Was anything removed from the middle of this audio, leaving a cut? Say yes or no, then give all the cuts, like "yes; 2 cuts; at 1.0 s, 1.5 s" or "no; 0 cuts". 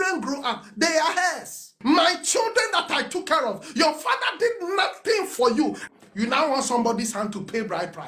yes; 1 cut; at 5.8 s